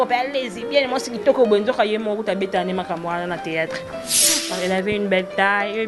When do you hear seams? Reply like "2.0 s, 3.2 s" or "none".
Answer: 4.4 s